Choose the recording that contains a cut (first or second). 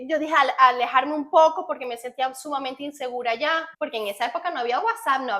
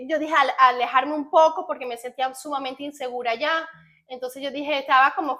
first